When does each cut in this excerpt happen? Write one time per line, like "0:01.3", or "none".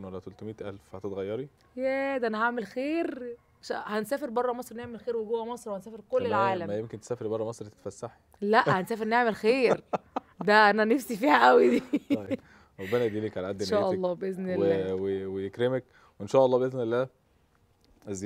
none